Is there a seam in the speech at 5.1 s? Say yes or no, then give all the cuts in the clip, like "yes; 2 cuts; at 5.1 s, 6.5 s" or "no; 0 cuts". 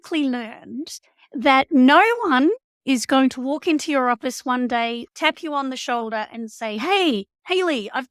yes; 1 cut; at 5.1 s